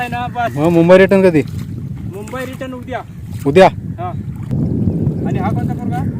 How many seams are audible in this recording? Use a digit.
1